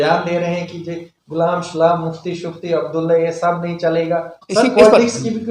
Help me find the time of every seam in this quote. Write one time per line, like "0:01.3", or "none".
0:04.4

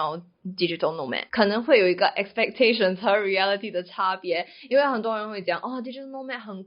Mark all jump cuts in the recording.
0:01.2

